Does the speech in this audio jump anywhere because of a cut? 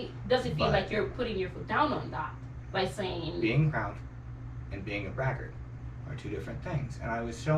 no; 0 cuts

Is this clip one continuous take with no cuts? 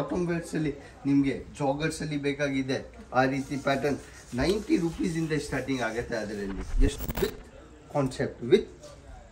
no; 1 cut; at 7.0 s

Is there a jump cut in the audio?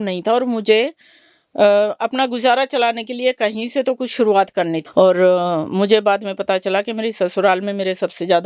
yes; 1 cut; at 4.8 s

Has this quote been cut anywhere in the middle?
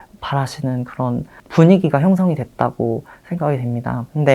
yes; 1 cut; at 1.4 s

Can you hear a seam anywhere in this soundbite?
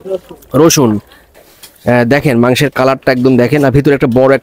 yes; 1 cut; at 1.3 s

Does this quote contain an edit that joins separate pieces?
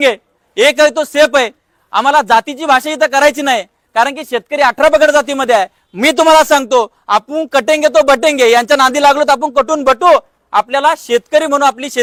no; 0 cuts

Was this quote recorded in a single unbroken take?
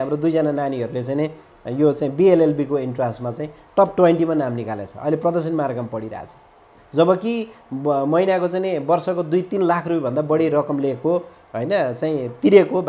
yes; 0 cuts

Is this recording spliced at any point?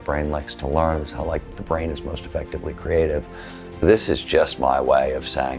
yes; 1 cut; at 3.8 s

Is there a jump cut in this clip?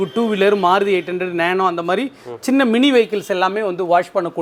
no; 0 cuts

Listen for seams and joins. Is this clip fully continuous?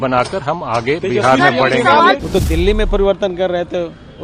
no; 1 cut; at 2.2 s

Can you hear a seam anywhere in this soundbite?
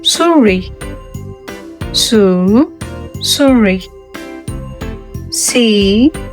yes; 2 cuts; at 3.8 s, 5.4 s

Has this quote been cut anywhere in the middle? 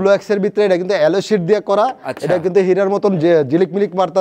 no; 0 cuts

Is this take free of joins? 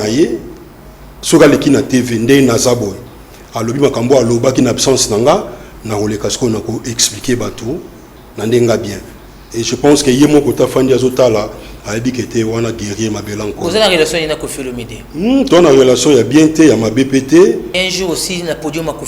no; 1 cut; at 17.7 s

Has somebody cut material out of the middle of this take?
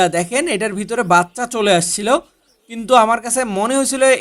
no; 0 cuts

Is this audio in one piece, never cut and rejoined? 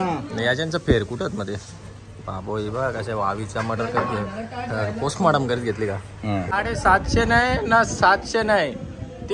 no; 1 cut; at 6.5 s

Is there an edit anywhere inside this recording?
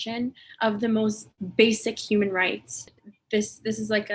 yes; 1 cut; at 2.9 s

